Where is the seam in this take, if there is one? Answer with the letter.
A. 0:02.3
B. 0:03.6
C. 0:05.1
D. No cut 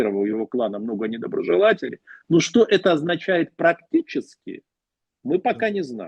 D